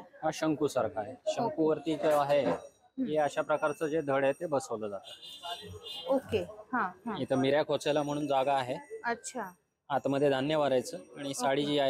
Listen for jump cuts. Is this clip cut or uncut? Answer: uncut